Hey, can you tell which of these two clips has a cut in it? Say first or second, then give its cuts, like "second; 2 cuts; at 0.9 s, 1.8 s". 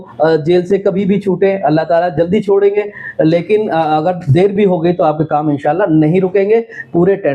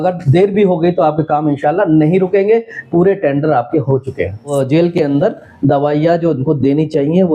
second; 1 cut; at 4.5 s